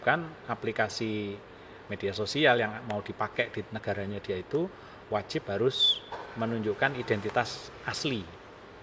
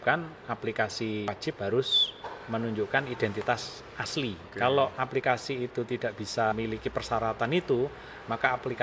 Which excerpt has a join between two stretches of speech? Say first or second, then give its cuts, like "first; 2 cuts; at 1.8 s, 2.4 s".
second; 3 cuts; at 1.3 s, 4.5 s, 6.5 s